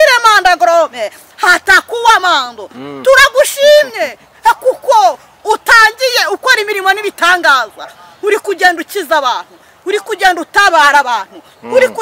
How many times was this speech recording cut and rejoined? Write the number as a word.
zero